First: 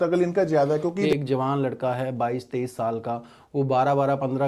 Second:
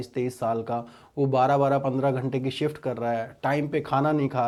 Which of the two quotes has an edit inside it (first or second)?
first